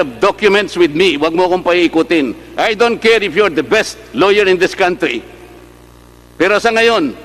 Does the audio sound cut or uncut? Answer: uncut